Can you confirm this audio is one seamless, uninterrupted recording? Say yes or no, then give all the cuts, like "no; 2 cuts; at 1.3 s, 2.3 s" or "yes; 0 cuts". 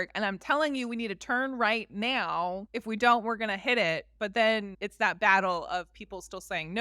no; 2 cuts; at 2.7 s, 4.8 s